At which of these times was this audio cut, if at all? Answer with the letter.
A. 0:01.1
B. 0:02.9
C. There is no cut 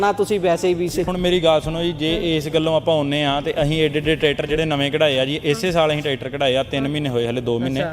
A